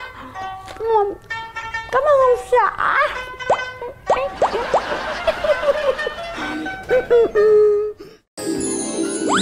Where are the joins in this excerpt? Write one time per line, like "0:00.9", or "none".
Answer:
0:08.3